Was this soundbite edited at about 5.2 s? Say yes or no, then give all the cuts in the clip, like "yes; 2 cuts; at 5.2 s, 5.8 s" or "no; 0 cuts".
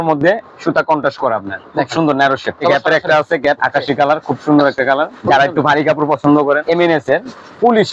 yes; 5 cuts; at 1.6 s, 2.6 s, 3.6 s, 5.2 s, 6.6 s